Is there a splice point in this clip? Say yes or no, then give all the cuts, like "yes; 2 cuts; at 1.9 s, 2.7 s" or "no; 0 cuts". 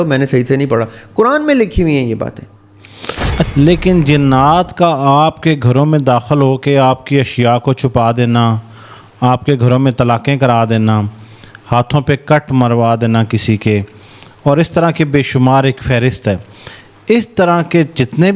yes; 1 cut; at 3.5 s